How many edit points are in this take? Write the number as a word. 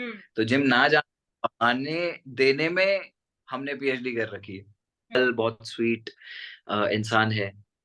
one